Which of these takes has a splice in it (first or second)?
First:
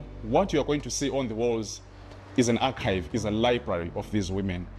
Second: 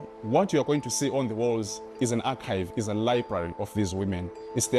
second